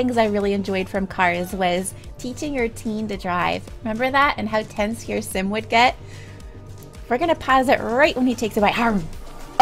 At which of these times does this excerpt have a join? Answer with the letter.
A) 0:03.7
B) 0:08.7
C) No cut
A